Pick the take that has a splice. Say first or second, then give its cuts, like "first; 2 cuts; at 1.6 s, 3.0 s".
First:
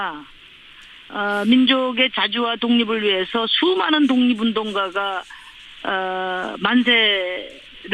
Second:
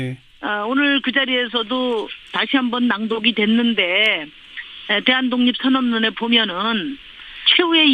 first; 1 cut; at 6.3 s